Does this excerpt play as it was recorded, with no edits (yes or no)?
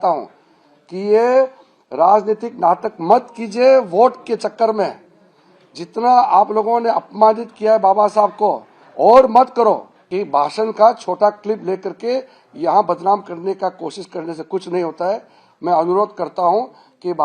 no